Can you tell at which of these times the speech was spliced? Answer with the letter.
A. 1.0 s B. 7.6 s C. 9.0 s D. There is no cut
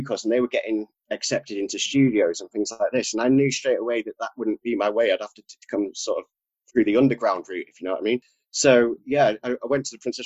A